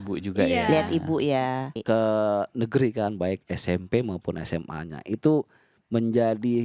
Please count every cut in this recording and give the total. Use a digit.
1